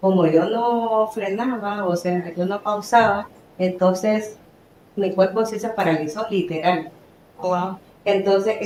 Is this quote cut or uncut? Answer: uncut